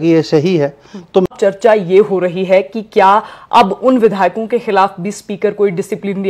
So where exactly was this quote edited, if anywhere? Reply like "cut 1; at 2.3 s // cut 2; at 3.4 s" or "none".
cut 1; at 1.3 s